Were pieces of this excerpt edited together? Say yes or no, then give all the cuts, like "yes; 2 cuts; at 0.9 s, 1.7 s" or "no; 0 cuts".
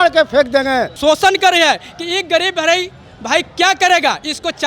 yes; 1 cut; at 0.9 s